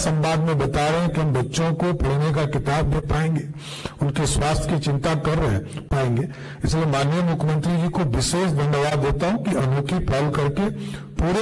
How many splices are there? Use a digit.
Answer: 0